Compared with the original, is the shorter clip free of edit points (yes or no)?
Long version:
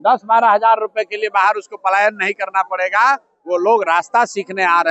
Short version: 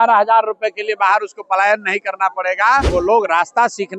no